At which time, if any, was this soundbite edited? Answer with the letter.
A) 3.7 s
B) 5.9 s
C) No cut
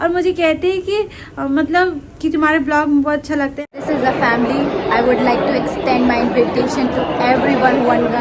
A